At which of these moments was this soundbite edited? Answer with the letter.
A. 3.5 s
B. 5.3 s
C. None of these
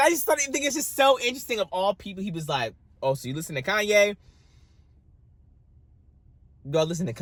C